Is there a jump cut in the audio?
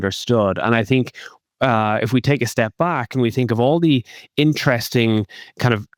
no; 0 cuts

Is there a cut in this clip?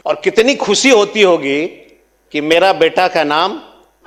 no; 0 cuts

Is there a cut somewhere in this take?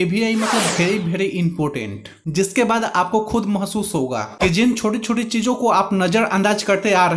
no; 0 cuts

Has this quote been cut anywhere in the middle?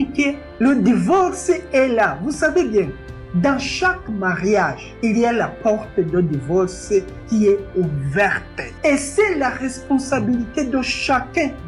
no; 0 cuts

